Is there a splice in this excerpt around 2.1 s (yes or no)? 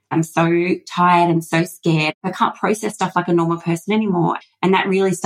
yes